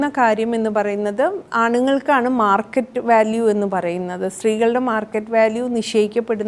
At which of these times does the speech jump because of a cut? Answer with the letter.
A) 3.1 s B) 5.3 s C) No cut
C